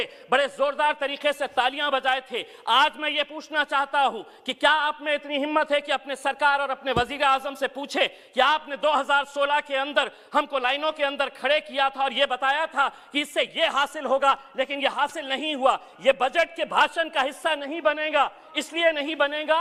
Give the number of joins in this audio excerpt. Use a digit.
0